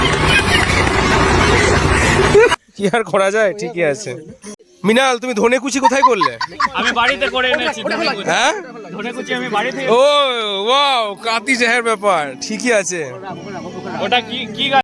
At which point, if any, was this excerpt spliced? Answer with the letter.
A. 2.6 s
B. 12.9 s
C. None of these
C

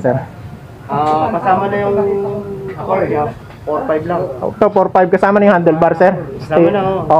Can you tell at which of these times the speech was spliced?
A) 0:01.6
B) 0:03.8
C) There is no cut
C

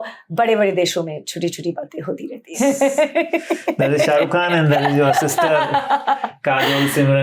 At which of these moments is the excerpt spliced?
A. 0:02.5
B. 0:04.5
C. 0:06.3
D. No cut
A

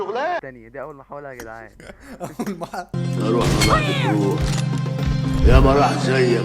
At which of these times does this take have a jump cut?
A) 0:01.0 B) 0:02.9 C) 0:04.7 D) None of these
B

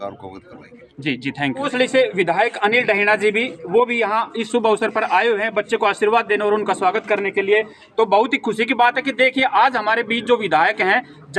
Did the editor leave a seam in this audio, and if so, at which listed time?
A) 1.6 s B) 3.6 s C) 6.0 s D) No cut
A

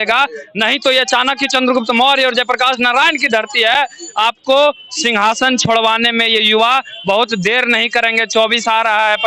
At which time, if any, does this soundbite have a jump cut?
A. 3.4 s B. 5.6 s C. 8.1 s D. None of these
D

